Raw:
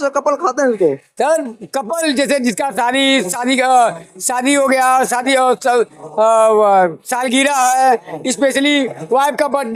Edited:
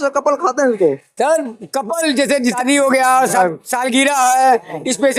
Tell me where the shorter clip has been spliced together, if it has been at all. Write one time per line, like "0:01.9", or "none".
0:02.6
0:03.4